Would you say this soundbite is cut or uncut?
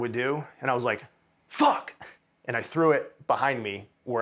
uncut